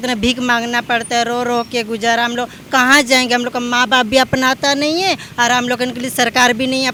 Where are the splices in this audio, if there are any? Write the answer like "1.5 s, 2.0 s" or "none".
none